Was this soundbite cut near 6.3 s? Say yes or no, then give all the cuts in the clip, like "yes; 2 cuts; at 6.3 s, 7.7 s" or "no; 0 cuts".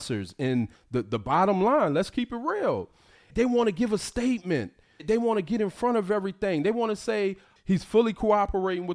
no; 2 cuts; at 3.3 s, 5.0 s